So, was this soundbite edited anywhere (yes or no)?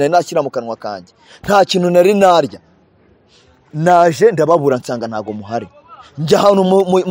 no